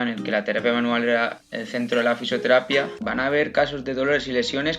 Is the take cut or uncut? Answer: cut